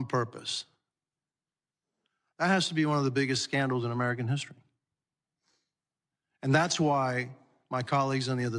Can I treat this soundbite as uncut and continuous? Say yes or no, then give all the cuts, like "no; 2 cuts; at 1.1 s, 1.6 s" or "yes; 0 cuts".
yes; 0 cuts